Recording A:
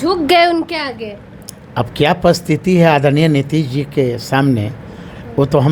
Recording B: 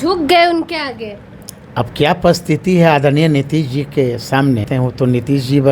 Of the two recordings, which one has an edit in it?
B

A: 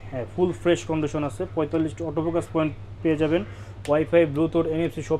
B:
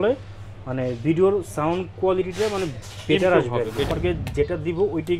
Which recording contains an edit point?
B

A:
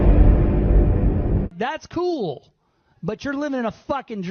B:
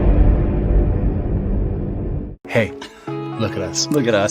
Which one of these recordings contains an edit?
B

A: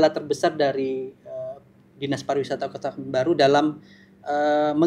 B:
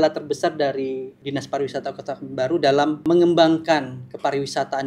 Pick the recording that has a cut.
B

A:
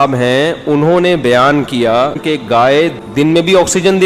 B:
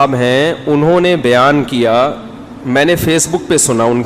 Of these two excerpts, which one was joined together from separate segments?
A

